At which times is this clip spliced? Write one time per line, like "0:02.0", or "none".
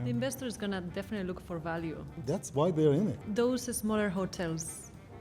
0:02.2
0:03.2